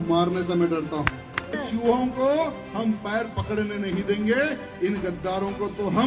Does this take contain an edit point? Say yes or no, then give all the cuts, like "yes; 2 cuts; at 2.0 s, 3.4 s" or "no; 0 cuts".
yes; 1 cut; at 1.6 s